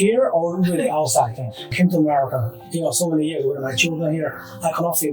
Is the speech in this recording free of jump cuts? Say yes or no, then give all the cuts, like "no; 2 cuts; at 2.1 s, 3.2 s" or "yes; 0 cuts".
no; 1 cut; at 1.7 s